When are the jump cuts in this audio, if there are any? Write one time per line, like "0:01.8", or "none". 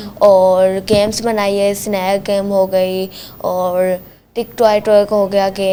none